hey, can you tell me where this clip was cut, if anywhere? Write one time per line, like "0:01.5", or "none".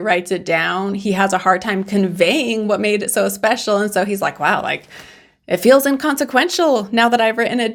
none